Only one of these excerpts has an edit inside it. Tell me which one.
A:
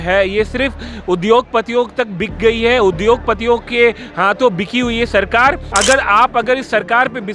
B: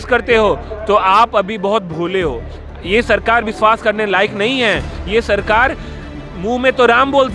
A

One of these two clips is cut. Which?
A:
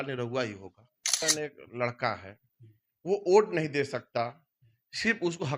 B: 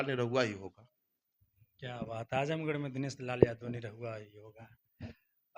A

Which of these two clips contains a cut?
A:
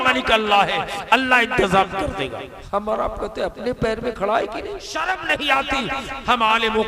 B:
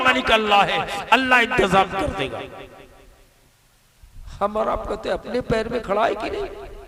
A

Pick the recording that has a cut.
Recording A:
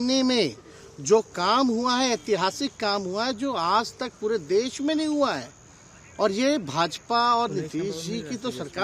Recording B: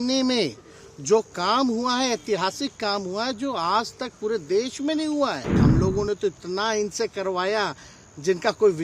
B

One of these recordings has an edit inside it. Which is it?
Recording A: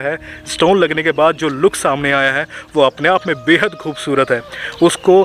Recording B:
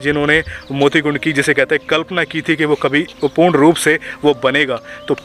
B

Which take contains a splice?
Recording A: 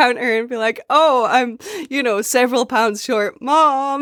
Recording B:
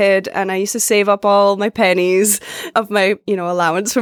B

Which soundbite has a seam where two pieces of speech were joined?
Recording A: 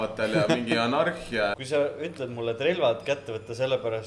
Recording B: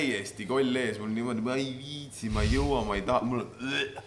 A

